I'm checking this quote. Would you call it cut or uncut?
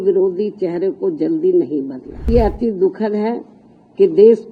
cut